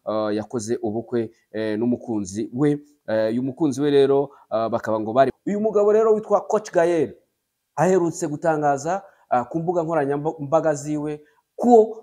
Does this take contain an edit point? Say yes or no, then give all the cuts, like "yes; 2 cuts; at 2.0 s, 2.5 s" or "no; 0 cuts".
yes; 1 cut; at 5.3 s